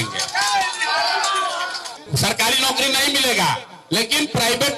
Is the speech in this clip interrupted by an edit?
yes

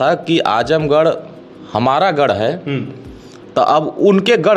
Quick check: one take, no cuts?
yes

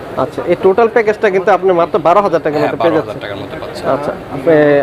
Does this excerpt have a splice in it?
no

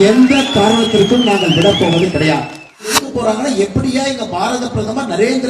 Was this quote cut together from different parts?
yes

